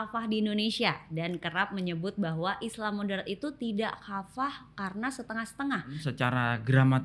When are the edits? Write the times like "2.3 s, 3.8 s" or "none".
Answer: 6.0 s

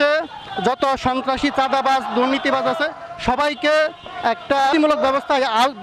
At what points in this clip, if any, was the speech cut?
4.7 s

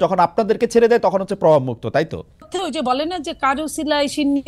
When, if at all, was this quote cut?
2.5 s

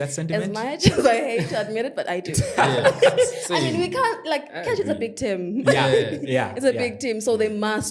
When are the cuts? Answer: none

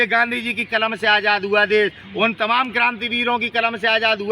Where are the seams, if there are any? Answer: none

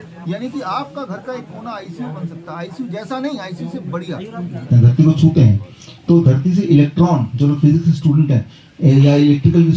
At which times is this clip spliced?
4.7 s

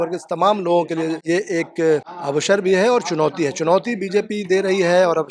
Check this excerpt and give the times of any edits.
1.2 s, 2.2 s

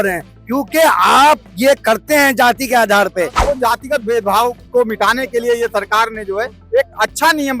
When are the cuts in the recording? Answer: 3.4 s

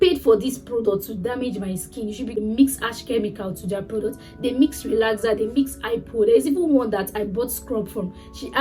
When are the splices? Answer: 2.4 s

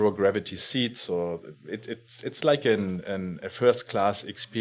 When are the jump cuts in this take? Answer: none

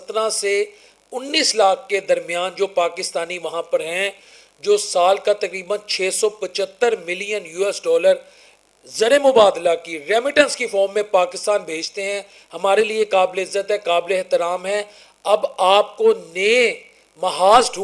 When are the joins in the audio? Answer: none

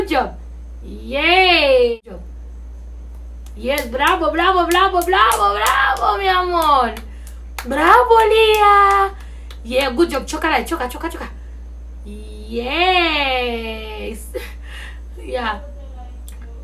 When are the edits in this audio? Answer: 2.0 s

